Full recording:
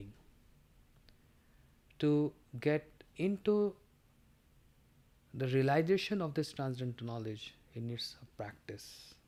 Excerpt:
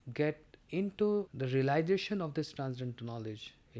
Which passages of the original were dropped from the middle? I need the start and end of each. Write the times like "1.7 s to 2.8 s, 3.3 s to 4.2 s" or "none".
3.8 s to 5.3 s